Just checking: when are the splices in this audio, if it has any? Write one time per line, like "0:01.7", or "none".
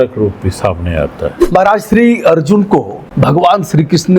0:01.4
0:03.0